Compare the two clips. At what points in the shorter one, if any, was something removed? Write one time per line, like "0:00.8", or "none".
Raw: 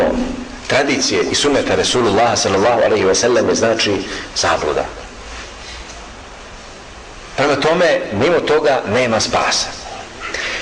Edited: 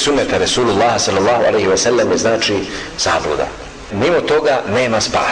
0:03.9